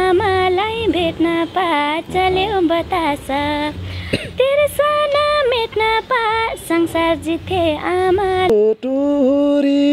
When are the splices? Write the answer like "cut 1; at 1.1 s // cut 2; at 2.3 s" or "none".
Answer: cut 1; at 8.5 s

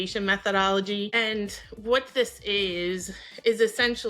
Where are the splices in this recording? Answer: cut 1; at 1.1 s

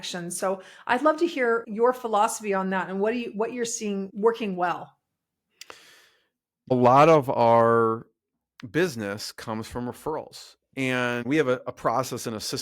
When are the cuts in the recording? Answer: cut 1; at 1.7 s // cut 2; at 4.1 s // cut 3; at 6.7 s // cut 4; at 11.2 s

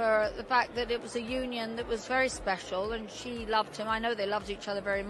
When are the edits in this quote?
none

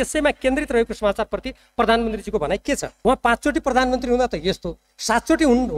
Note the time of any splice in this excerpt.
cut 1; at 2.9 s

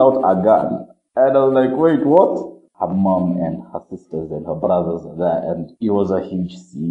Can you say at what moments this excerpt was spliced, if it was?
cut 1; at 2.6 s // cut 2; at 5.7 s

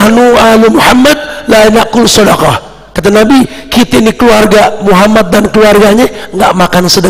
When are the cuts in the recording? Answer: none

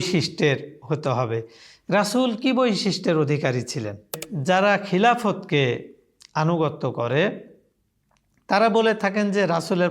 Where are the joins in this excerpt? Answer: cut 1; at 4.3 s

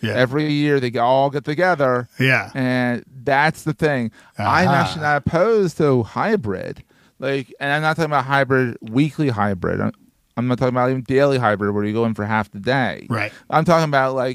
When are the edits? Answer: none

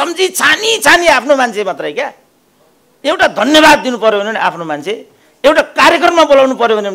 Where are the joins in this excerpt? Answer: none

